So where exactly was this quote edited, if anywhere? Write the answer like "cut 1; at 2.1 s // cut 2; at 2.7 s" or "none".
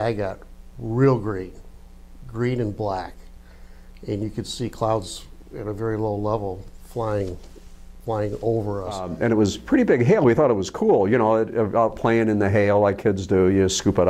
cut 1; at 9.0 s